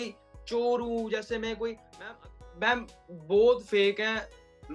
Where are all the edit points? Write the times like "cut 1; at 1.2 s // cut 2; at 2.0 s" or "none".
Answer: cut 1; at 1.9 s